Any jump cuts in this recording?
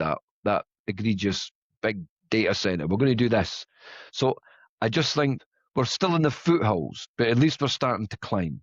yes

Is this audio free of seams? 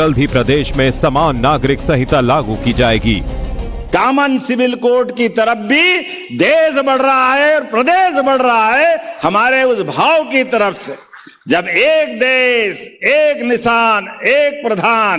yes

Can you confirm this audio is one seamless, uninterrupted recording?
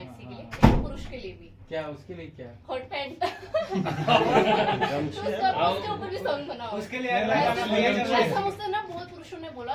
yes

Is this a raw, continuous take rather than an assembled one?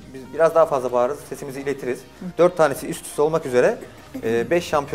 no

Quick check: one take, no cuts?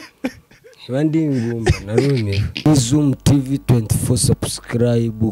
no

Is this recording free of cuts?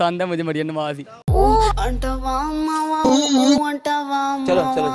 yes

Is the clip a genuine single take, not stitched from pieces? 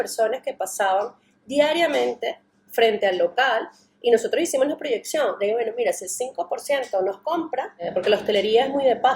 no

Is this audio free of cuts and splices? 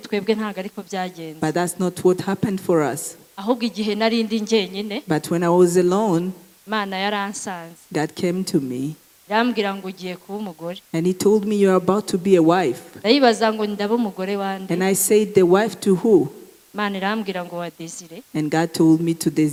yes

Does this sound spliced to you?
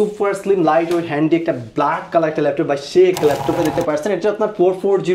yes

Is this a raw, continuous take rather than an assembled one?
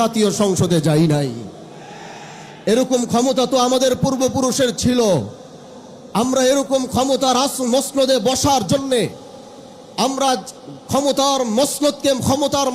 yes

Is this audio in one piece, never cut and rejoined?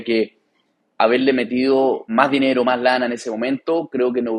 no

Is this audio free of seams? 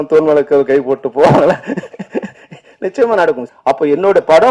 no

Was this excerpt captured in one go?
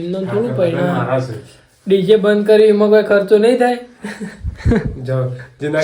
yes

